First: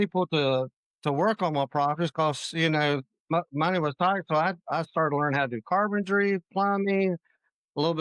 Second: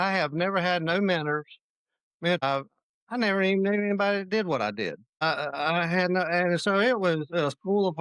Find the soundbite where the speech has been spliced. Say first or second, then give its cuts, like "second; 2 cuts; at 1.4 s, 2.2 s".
second; 2 cuts; at 2.4 s, 5.1 s